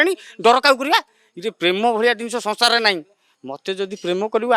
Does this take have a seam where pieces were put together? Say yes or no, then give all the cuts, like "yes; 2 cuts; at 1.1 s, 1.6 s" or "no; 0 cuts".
no; 0 cuts